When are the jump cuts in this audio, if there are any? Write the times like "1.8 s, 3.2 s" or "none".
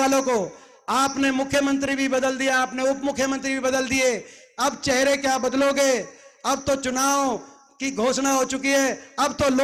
none